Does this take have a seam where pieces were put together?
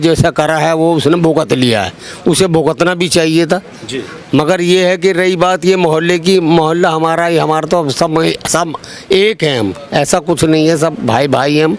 no; 0 cuts

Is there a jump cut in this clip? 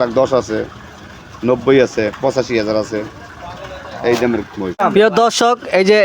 yes; 1 cut; at 4.8 s

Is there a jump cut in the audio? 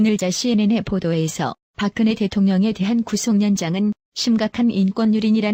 no; 0 cuts

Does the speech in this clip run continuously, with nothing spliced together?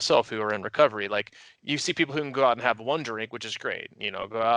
no; 1 cut; at 1.5 s

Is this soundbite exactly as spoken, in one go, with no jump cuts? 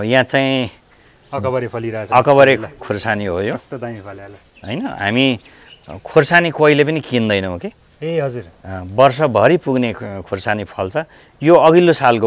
yes; 0 cuts

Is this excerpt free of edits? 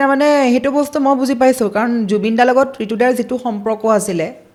yes; 0 cuts

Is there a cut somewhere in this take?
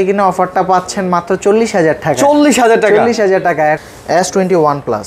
yes; 1 cut; at 3.9 s

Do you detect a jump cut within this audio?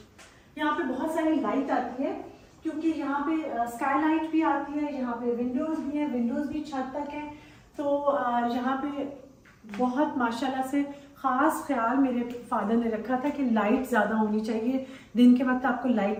no; 0 cuts

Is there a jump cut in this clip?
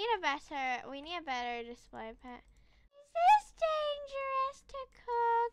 yes; 1 cut; at 3.0 s

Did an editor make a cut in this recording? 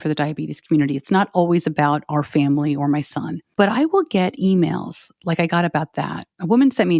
yes; 1 cut; at 3.4 s

